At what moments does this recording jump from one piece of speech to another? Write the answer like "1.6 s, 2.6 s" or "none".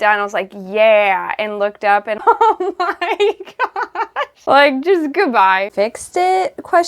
2.2 s, 4.3 s, 5.7 s